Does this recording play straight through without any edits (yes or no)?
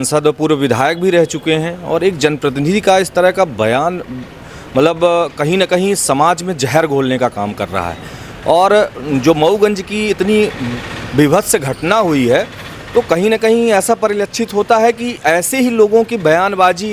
yes